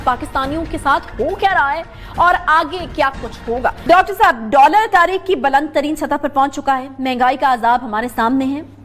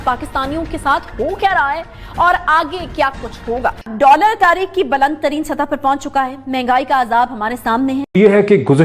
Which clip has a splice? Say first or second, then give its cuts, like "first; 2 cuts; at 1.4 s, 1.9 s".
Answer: second; 2 cuts; at 3.8 s, 8.1 s